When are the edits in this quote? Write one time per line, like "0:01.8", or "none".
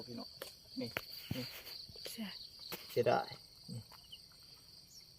0:02.9

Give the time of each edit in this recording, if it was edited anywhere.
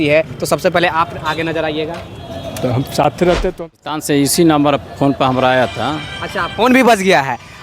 0:03.5

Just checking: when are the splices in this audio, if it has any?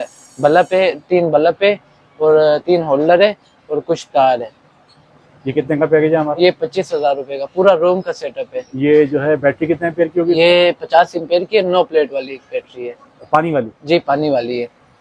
none

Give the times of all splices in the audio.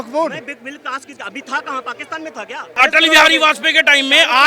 0:02.7

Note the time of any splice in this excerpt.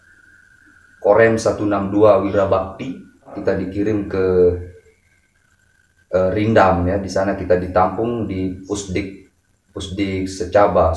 0:03.4

